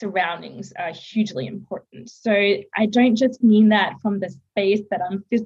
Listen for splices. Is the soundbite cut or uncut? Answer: uncut